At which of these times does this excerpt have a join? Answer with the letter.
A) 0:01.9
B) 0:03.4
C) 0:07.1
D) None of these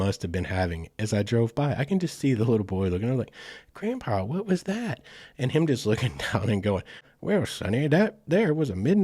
C